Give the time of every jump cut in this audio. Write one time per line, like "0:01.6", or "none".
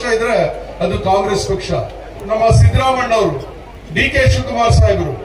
0:02.2